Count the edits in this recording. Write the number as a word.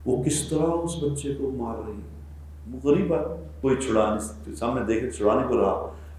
one